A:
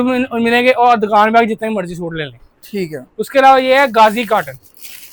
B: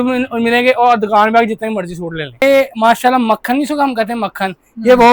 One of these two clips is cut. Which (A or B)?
B